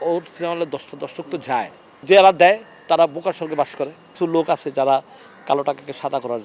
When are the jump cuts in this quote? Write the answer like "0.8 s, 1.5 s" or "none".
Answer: 2.0 s, 4.1 s